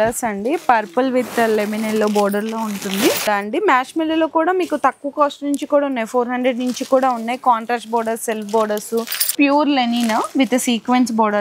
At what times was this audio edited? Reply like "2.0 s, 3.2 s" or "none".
3.2 s, 9.2 s